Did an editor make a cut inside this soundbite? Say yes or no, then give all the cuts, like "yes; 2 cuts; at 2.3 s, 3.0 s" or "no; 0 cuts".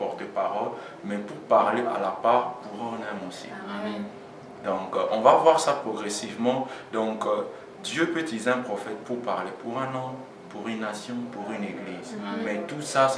no; 0 cuts